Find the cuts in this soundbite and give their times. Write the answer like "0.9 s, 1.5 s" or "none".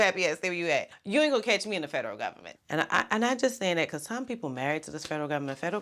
1.0 s, 2.5 s